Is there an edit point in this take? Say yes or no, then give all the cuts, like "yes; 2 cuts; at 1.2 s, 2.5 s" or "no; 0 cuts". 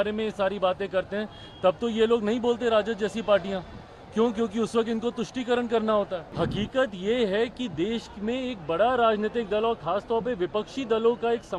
yes; 1 cut; at 6.2 s